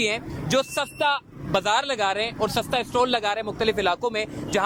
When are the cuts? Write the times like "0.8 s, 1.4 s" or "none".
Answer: none